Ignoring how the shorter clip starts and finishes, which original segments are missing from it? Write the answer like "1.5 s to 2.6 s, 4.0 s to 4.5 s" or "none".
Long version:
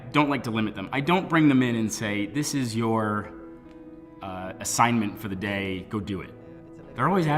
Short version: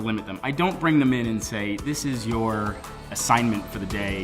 3.5 s to 4.5 s